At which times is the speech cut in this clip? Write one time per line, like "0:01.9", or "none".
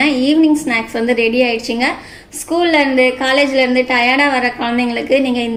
none